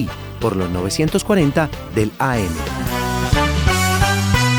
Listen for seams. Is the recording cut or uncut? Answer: uncut